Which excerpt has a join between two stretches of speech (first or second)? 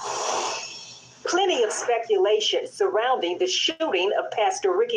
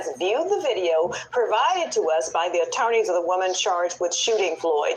first